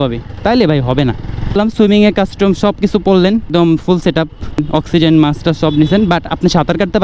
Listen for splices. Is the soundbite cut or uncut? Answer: cut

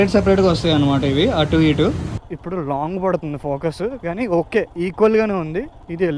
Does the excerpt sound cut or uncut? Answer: cut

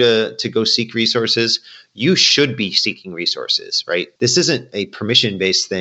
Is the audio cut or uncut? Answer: cut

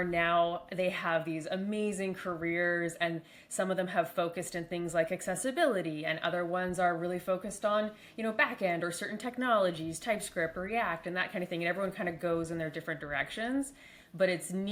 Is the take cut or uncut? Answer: uncut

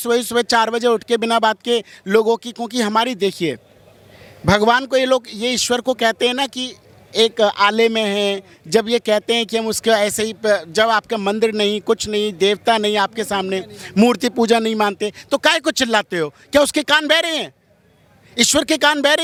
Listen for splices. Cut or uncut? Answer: uncut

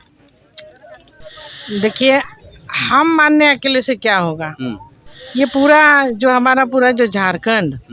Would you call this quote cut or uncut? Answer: cut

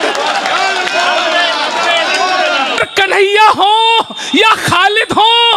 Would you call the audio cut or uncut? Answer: cut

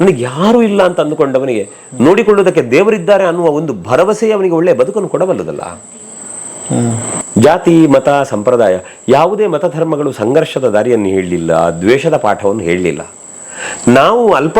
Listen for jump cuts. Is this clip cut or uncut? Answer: cut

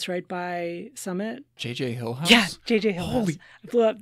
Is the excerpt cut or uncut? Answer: cut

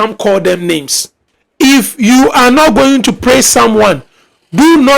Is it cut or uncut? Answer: cut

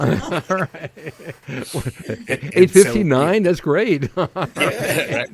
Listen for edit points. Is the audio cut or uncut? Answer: uncut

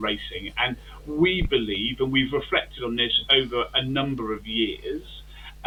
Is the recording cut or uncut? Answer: uncut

